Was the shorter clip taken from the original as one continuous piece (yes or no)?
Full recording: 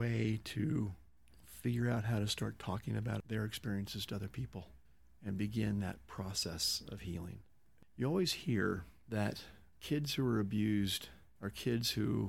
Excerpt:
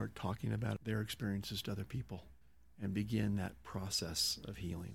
yes